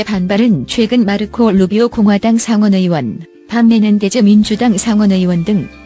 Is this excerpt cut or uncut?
uncut